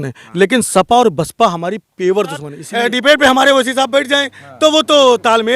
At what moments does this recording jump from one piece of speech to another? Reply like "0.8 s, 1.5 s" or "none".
2.6 s